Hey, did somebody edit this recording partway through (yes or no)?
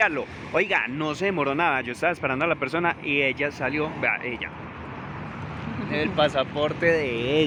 no